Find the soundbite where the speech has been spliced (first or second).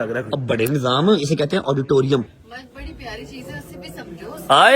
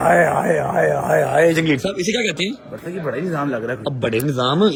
first